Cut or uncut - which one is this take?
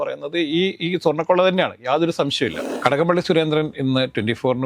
cut